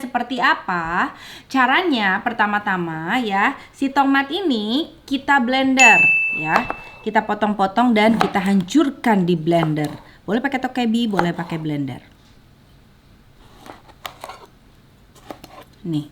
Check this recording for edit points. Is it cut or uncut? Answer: uncut